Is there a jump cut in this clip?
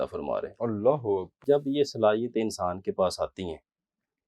yes; 1 cut; at 1.4 s

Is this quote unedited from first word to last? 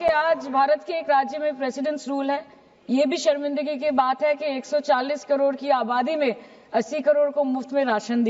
yes; 0 cuts

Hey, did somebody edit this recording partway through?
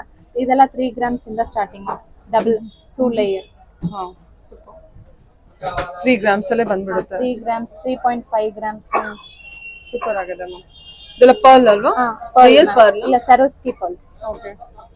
no; 0 cuts

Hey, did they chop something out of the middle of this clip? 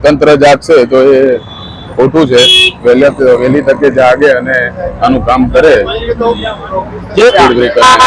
no; 0 cuts

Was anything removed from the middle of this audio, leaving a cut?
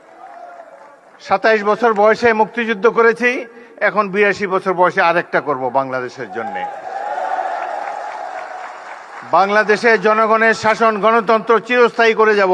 yes; 1 cut; at 11.4 s

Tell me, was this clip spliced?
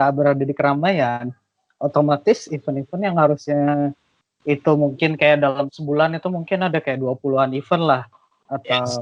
no; 0 cuts

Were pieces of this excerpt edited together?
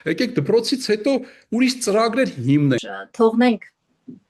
yes; 1 cut; at 2.9 s

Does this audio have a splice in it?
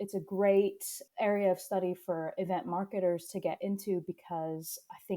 yes; 1 cut; at 1.0 s

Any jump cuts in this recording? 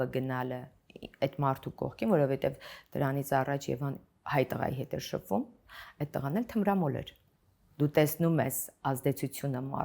no; 0 cuts

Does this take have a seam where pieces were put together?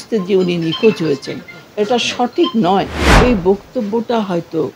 yes; 1 cut; at 3.2 s

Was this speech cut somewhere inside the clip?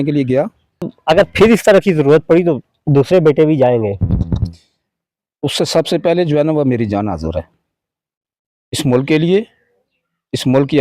yes; 1 cut; at 0.9 s

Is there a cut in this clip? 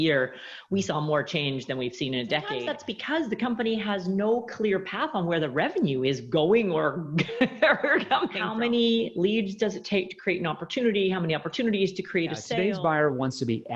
yes; 3 cuts; at 2.6 s, 8.4 s, 12.5 s

